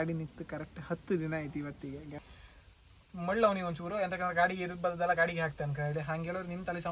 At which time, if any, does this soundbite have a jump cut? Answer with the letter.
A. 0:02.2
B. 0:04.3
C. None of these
A